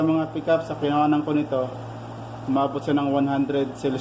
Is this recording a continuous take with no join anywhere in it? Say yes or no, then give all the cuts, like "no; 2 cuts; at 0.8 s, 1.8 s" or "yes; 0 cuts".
yes; 0 cuts